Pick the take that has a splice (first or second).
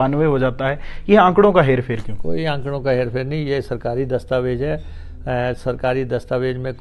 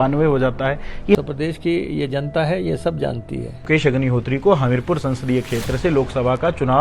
second